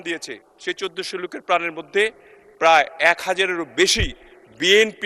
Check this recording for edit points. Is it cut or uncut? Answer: uncut